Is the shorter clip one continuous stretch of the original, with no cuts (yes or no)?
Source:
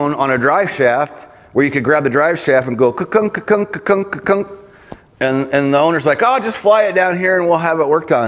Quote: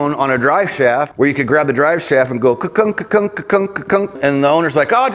no